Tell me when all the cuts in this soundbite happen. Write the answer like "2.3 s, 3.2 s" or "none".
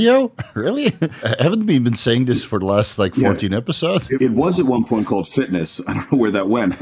1.3 s, 4.2 s

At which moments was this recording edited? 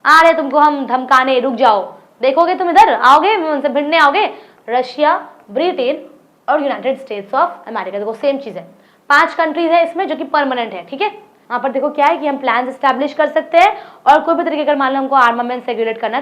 4.5 s, 11.3 s

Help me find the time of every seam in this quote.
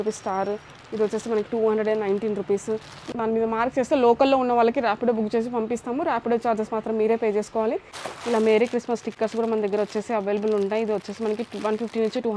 3.0 s, 8.0 s

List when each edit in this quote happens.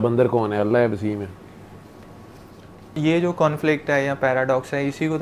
3.0 s

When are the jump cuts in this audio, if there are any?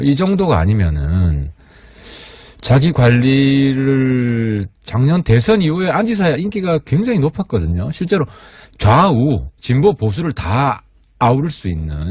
7.1 s

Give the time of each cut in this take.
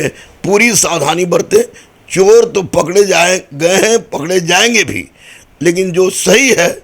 none

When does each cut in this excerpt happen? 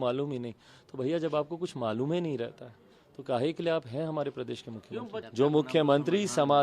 5.2 s

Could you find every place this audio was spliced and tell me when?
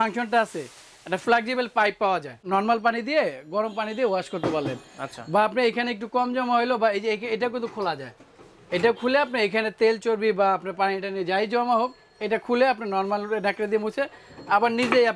2.4 s

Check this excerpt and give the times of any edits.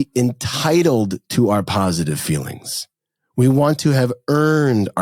none

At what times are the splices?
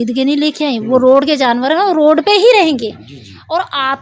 none

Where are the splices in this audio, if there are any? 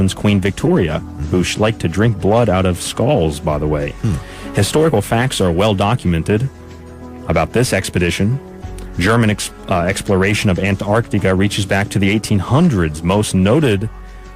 10.7 s

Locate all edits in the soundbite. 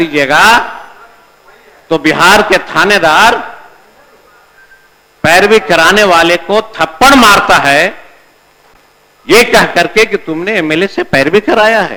none

